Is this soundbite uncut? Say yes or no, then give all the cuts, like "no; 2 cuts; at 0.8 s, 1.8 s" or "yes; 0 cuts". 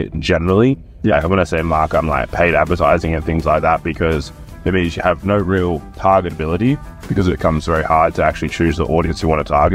yes; 0 cuts